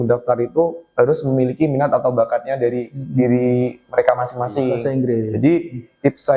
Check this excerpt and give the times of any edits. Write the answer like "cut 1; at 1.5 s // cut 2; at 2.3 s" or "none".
cut 1; at 4.8 s